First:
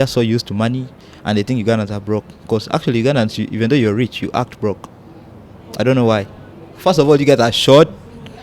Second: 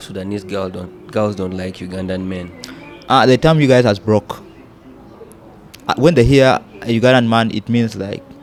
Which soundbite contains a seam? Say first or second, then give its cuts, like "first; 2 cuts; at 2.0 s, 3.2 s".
first; 1 cut; at 6.7 s